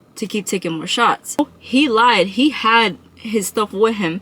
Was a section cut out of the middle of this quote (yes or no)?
yes